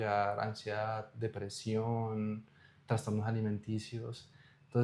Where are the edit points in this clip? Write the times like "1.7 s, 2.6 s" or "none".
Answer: none